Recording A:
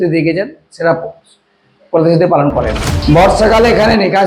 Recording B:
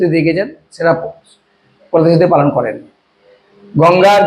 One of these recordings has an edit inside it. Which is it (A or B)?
A